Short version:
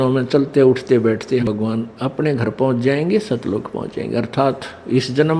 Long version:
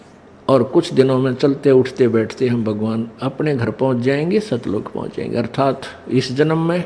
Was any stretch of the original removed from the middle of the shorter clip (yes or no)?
yes